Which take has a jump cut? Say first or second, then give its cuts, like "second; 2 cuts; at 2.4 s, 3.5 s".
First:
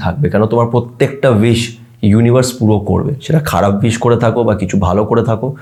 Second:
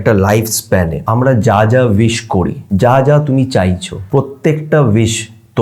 second; 3 cuts; at 1.0 s, 2.6 s, 3.9 s